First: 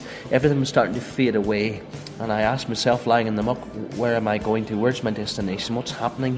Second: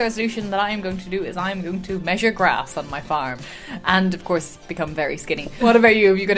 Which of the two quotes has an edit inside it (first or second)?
second